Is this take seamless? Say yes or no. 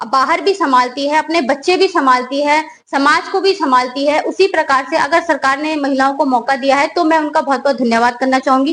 yes